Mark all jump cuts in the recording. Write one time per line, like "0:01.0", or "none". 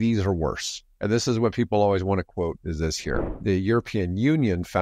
0:03.3

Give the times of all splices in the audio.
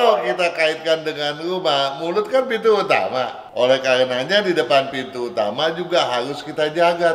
0:03.4

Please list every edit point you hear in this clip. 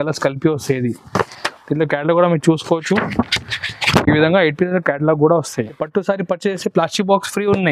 0:01.4
0:05.8

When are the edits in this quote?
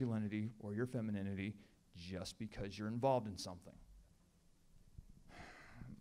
none

